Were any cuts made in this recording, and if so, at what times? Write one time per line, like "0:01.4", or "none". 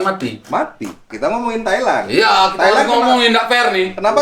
0:01.1